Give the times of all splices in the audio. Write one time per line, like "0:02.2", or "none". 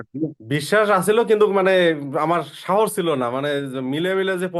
none